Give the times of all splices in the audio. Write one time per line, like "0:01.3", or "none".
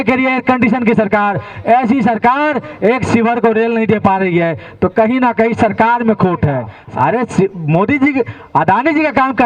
0:06.7

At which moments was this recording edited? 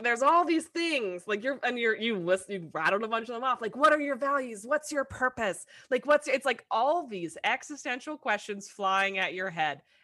none

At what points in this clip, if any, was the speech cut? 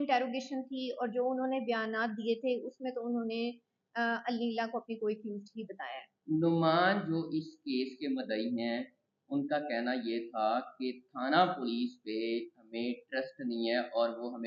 0:06.1

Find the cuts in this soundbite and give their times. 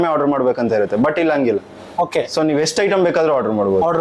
none

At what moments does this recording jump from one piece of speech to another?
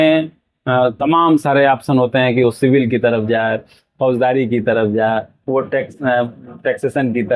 none

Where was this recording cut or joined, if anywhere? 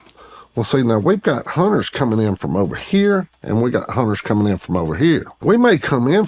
0:05.3

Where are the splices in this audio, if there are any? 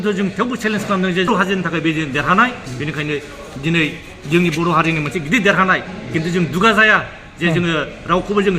0:01.3

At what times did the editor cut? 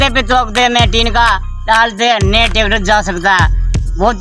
none

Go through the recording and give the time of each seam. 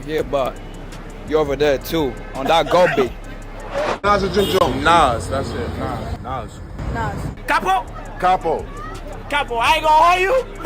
0:04.0
0:07.4

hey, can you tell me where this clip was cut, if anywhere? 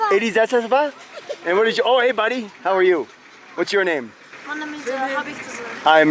none

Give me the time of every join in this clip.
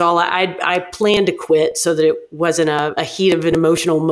0:02.9

